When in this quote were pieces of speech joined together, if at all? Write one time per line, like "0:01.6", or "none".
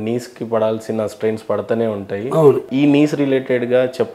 0:02.6